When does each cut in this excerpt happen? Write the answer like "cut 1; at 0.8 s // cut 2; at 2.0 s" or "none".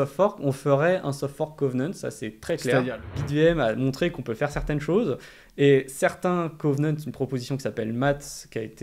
cut 1; at 3.2 s